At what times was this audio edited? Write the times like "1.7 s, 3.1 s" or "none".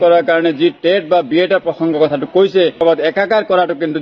2.8 s